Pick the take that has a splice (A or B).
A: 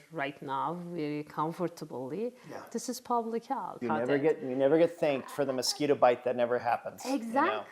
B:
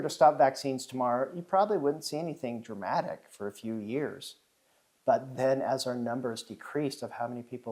A